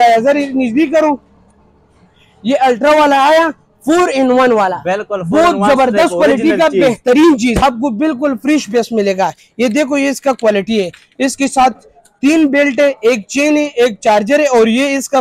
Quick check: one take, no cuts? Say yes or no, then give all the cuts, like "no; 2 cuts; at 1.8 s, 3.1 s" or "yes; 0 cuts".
no; 1 cut; at 7.6 s